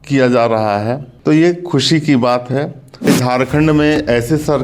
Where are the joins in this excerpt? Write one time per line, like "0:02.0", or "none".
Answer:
0:01.1
0:03.1